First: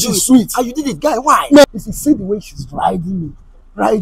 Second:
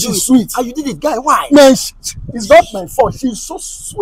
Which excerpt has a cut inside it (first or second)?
first